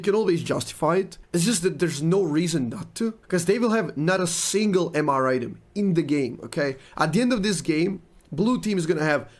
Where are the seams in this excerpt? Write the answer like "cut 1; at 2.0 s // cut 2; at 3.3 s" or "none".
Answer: cut 1; at 1.2 s // cut 2; at 3.2 s